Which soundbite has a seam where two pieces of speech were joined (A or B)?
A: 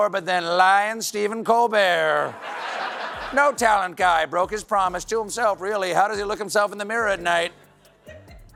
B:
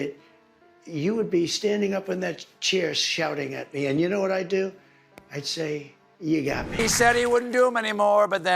B